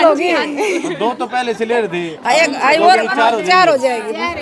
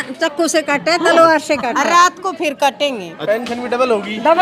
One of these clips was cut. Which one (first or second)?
second